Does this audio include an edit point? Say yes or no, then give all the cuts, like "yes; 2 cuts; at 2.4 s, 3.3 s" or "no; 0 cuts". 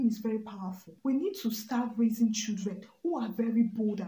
yes; 1 cut; at 0.9 s